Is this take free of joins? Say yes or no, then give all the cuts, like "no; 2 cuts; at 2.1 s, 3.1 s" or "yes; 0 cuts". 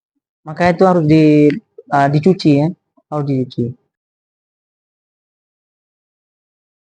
yes; 0 cuts